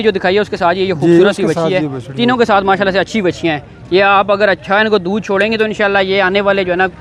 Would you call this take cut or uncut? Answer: uncut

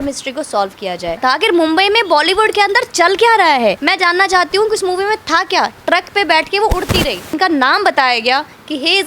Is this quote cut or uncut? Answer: cut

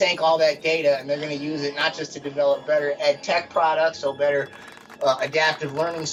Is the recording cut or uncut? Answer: uncut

